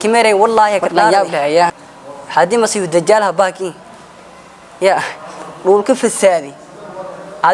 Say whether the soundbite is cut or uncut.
uncut